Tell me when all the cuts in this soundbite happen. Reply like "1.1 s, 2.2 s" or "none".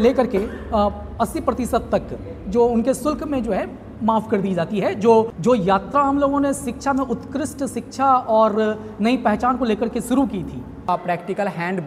5.3 s, 10.9 s